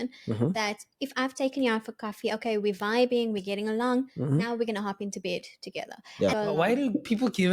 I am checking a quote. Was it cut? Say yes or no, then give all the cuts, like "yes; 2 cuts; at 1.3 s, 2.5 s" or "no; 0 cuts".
yes; 1 cut; at 6.3 s